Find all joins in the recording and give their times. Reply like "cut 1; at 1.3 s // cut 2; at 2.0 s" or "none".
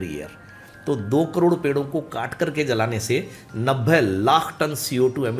none